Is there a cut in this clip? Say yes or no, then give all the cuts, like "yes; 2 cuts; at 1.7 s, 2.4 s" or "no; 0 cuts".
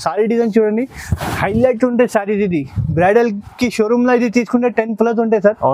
no; 0 cuts